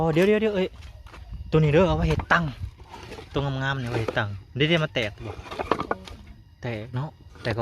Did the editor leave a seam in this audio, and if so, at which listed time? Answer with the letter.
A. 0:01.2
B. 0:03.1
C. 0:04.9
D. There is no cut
D